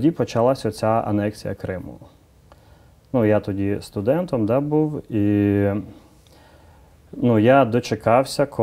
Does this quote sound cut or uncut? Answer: uncut